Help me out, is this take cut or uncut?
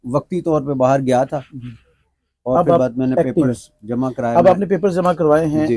uncut